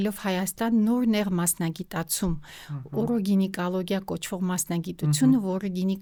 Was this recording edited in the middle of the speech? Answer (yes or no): no